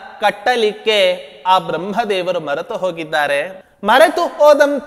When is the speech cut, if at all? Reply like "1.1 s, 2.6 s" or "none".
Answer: 3.6 s